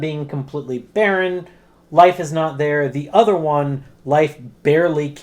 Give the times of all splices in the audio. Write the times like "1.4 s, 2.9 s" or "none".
none